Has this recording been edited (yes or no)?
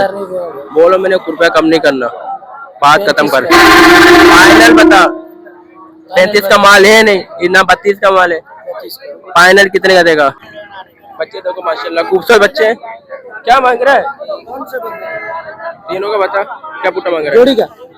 yes